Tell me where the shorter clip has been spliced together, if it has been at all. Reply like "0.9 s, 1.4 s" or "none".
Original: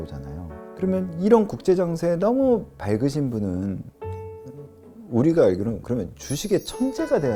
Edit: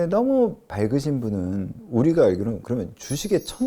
1.8 s